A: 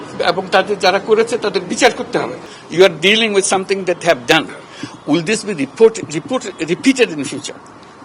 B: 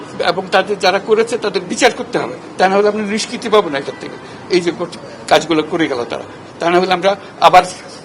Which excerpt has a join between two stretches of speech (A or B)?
A